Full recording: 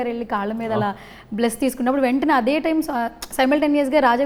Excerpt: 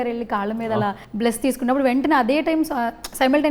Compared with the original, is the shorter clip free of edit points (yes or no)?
no